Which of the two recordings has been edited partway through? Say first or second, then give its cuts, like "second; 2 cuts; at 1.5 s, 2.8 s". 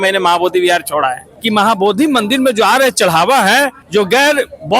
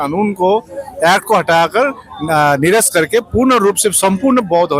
first; 2 cuts; at 1.3 s, 3.8 s